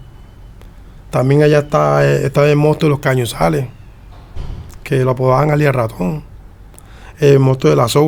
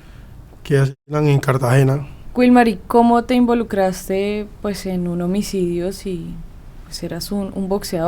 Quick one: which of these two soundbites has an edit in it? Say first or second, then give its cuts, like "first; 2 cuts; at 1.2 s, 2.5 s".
second; 1 cut; at 2.2 s